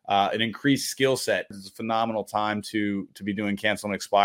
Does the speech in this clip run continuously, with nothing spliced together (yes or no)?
no